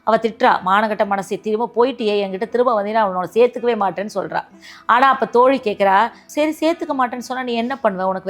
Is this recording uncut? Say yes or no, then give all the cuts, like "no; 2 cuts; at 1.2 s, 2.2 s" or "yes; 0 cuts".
no; 1 cut; at 6.2 s